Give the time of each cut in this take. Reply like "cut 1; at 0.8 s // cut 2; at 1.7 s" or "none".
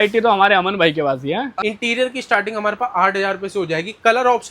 cut 1; at 1.5 s